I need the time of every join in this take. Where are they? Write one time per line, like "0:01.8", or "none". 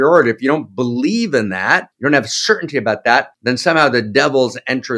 0:01.9
0:03.3